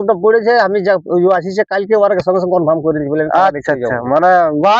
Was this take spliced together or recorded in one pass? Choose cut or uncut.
uncut